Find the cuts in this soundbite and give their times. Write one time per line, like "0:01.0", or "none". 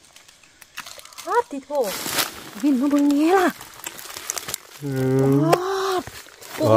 0:02.0